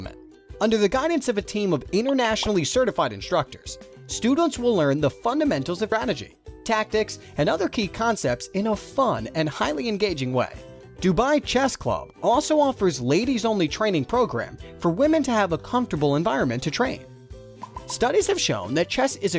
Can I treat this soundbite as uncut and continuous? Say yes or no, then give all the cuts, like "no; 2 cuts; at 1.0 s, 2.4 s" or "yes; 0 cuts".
no; 1 cut; at 5.9 s